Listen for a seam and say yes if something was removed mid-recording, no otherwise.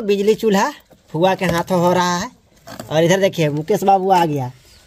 no